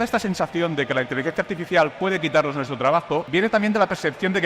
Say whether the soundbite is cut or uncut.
cut